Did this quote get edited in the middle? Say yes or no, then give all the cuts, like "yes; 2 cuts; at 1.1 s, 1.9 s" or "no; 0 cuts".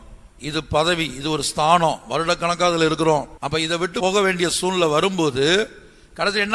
yes; 1 cut; at 3.4 s